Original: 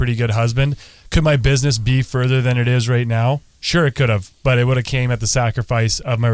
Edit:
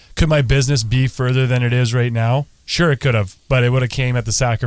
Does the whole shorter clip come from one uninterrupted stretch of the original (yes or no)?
yes